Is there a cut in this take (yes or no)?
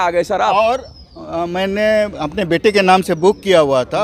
no